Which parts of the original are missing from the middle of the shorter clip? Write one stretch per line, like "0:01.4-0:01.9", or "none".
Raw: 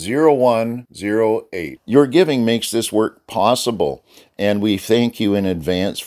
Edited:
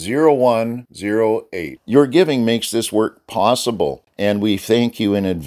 0:04.1-0:04.3